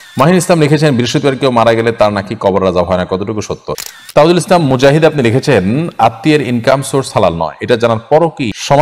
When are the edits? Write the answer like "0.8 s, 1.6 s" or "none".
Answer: 3.8 s